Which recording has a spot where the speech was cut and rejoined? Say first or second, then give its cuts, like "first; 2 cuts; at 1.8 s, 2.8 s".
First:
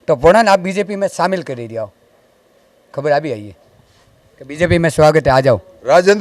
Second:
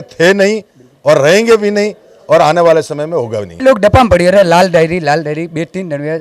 second; 1 cut; at 3.6 s